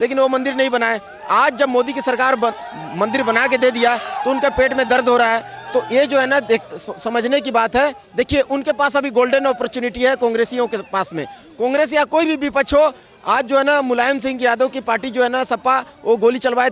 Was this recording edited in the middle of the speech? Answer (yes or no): no